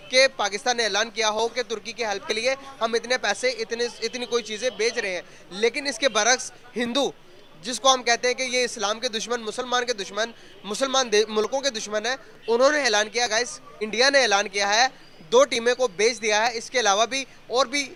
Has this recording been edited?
no; 0 cuts

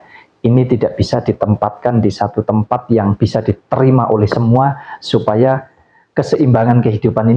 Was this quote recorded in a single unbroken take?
yes; 0 cuts

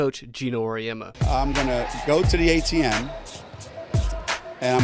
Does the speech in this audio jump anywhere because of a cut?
yes; 1 cut; at 2.3 s

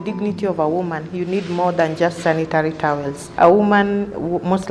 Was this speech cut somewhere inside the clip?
yes; 1 cut; at 3.3 s

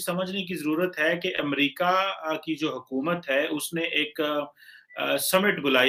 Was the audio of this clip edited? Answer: no; 0 cuts

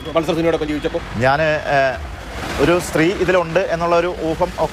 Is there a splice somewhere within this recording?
no; 0 cuts

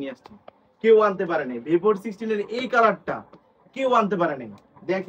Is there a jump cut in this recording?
no; 0 cuts

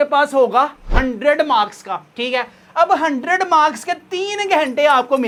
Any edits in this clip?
no; 0 cuts

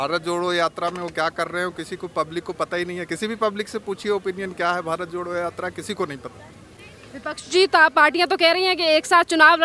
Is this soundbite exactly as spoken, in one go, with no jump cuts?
yes; 0 cuts

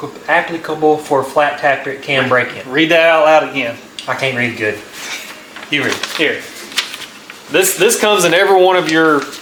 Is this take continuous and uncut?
yes; 0 cuts

